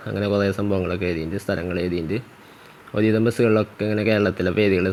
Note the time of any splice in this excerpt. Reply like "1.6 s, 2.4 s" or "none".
none